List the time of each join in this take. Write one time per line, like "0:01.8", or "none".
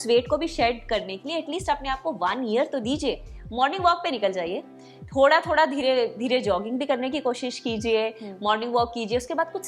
0:03.4

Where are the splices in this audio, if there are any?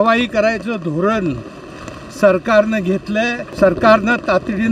0:03.4

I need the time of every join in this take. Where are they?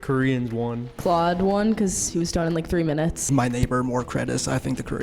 0:01.0
0:03.3

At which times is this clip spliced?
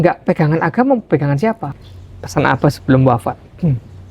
0:01.6

